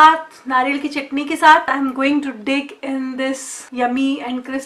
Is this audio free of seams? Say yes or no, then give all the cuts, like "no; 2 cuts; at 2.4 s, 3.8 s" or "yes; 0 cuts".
no; 2 cuts; at 1.7 s, 3.6 s